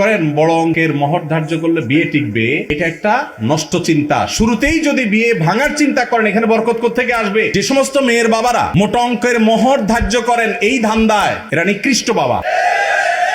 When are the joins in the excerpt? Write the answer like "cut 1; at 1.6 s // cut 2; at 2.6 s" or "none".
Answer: cut 1; at 7.5 s // cut 2; at 8.7 s // cut 3; at 12.4 s

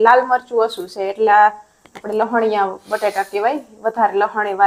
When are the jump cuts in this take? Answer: none

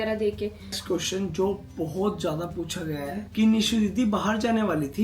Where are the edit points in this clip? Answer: cut 1; at 0.8 s // cut 2; at 3.3 s

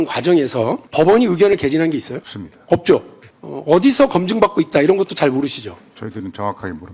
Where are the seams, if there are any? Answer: none

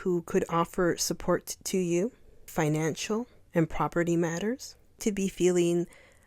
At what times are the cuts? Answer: cut 1; at 2.4 s // cut 2; at 3.4 s // cut 3; at 5.0 s

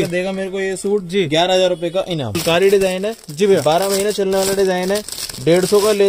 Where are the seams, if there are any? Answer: cut 1; at 2.4 s

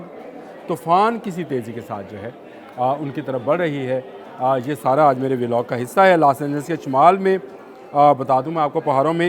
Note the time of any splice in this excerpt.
none

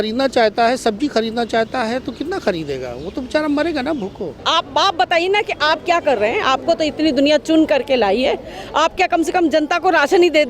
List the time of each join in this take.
cut 1; at 4.4 s

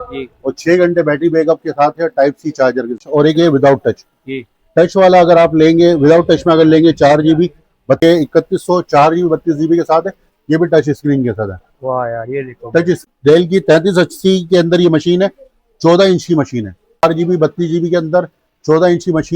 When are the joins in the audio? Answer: cut 1; at 3.0 s // cut 2; at 8.0 s // cut 3; at 13.0 s // cut 4; at 17.0 s

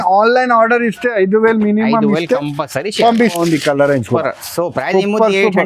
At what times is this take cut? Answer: cut 1; at 3.4 s

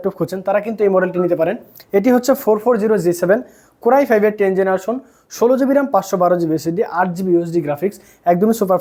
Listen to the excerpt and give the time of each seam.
none

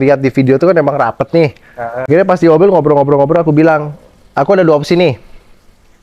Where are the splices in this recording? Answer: cut 1; at 2.1 s

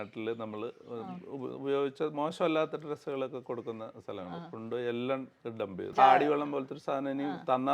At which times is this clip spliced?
cut 1; at 5.9 s

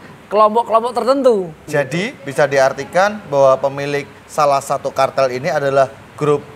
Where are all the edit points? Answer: cut 1; at 1.6 s

